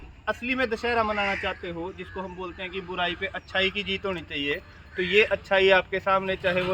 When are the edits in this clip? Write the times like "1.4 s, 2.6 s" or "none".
none